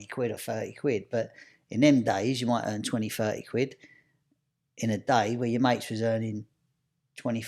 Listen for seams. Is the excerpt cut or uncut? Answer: uncut